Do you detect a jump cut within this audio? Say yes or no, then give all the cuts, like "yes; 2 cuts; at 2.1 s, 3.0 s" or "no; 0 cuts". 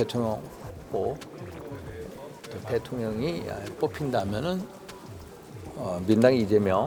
no; 0 cuts